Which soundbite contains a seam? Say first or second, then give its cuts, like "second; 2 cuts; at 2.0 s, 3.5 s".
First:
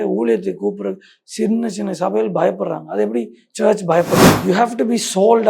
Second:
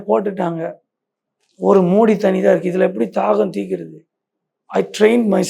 first; 1 cut; at 4.3 s